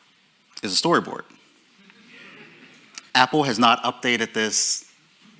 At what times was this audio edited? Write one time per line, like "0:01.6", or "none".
0:03.1